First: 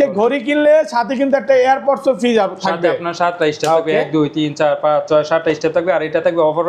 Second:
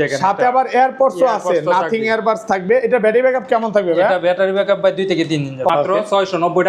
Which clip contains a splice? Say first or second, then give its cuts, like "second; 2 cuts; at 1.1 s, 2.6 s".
second; 1 cut; at 5.7 s